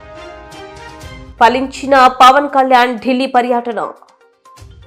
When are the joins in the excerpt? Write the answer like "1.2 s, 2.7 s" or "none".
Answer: 1.3 s